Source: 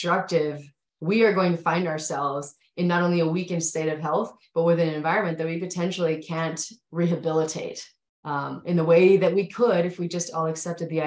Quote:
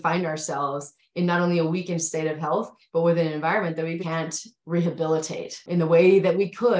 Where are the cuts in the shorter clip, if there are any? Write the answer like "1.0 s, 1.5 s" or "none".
4.0 s, 5.6 s